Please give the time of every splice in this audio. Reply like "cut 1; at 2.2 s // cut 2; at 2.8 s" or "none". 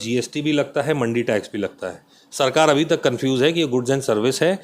none